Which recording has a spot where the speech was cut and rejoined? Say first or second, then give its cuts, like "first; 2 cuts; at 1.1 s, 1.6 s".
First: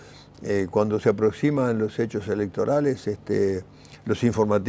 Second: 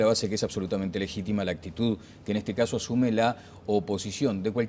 second; 1 cut; at 3.6 s